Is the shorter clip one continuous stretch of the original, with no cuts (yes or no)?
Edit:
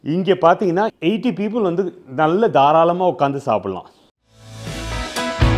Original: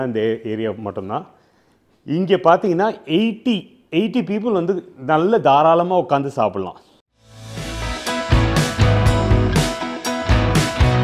no